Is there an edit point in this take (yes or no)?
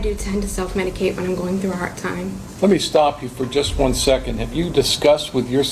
yes